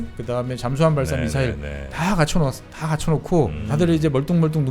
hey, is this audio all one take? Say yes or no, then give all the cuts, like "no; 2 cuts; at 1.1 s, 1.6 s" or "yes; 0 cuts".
no; 1 cut; at 3.6 s